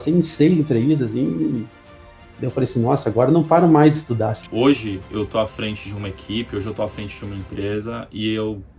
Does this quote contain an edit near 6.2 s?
no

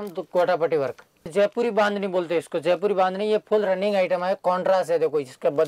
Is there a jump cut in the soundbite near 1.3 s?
yes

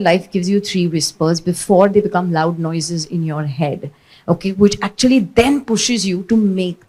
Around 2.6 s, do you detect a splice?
no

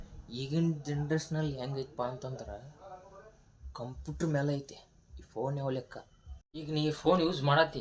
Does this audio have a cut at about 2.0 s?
no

